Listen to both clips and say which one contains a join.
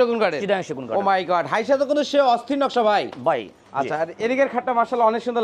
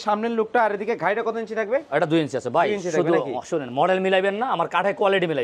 first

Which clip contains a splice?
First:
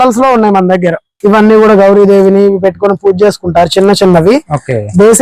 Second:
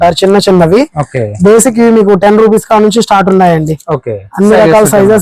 first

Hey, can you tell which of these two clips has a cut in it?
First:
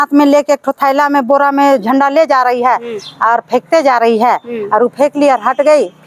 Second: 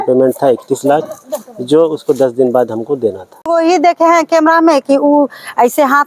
second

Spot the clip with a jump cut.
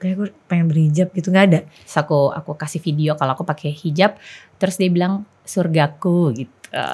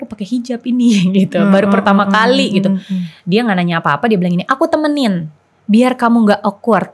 first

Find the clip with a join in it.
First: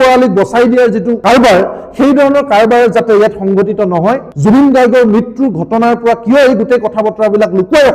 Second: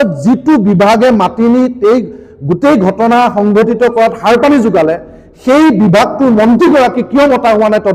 first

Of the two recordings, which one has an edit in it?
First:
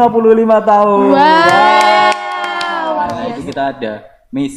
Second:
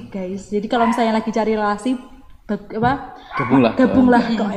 first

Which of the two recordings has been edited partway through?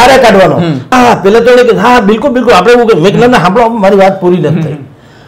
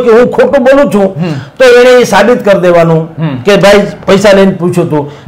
first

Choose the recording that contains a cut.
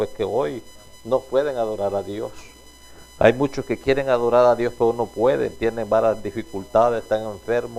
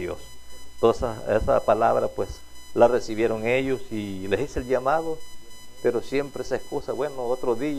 second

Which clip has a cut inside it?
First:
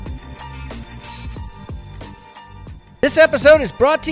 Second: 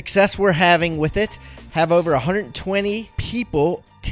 first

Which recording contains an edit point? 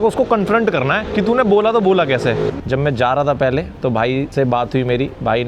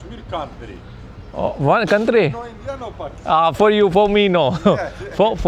first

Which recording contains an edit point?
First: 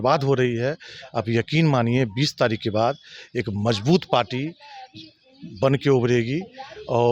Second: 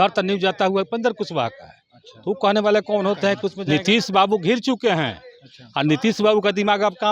second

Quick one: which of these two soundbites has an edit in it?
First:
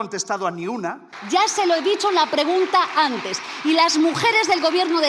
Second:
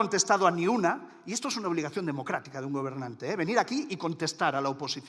first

